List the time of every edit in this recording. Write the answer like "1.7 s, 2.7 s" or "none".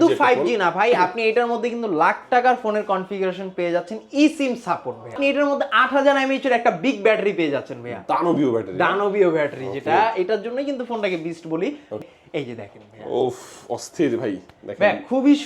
5.2 s, 12.0 s